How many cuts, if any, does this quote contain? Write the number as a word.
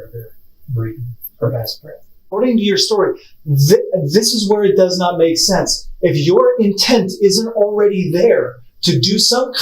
two